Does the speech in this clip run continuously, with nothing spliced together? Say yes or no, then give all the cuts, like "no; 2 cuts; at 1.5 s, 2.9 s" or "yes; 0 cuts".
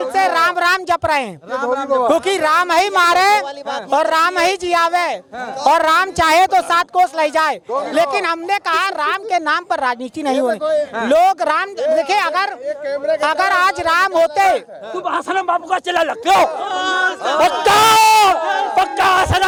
yes; 0 cuts